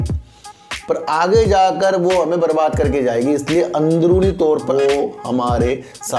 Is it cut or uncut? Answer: cut